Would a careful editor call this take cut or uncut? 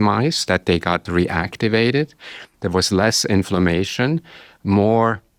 uncut